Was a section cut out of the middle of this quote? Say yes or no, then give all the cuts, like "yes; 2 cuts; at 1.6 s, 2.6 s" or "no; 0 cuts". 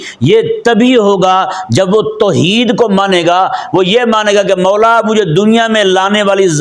no; 0 cuts